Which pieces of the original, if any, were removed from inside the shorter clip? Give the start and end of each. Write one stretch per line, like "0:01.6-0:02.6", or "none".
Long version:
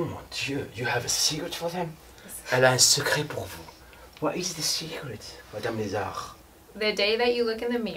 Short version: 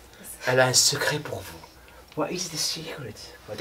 none